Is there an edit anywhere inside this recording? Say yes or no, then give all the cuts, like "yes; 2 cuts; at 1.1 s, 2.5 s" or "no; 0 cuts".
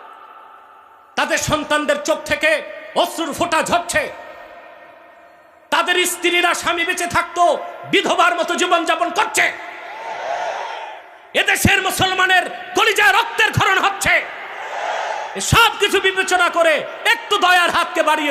no; 0 cuts